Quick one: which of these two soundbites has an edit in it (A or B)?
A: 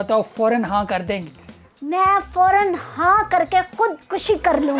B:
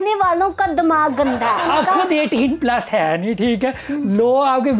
B